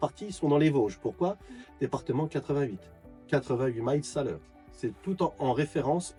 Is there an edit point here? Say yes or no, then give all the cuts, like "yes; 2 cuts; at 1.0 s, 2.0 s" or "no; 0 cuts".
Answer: no; 0 cuts